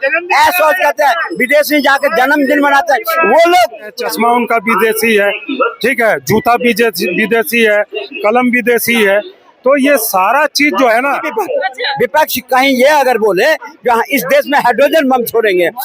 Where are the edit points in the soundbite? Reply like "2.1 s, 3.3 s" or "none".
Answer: 4.0 s, 11.3 s

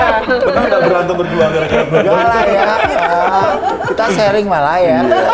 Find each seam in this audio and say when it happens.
none

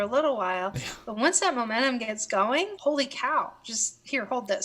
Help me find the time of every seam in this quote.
2.7 s

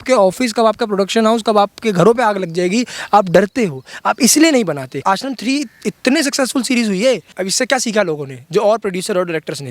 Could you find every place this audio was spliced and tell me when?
5.0 s, 7.3 s

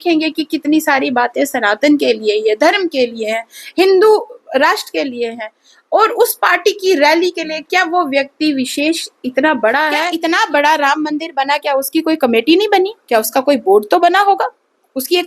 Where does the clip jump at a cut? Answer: 10.1 s

